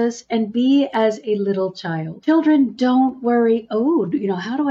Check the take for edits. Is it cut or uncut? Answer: cut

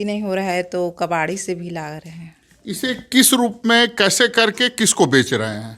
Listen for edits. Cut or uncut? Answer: uncut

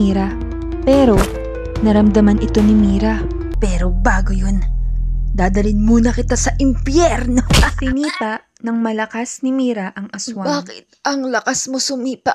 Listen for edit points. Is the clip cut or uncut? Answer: cut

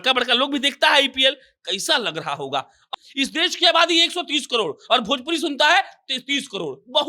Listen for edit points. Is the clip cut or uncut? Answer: cut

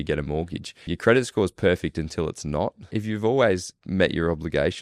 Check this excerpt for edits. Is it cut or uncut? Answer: cut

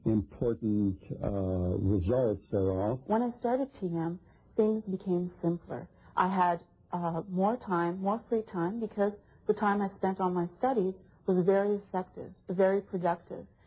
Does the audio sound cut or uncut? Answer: cut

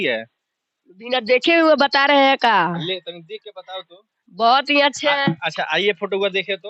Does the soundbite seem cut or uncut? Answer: uncut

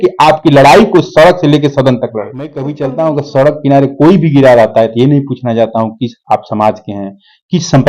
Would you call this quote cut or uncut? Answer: cut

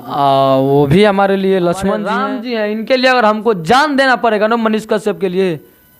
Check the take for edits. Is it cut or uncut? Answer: cut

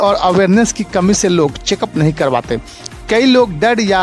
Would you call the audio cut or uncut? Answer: uncut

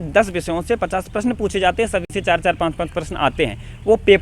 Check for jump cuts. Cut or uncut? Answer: uncut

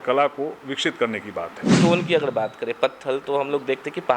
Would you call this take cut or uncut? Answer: cut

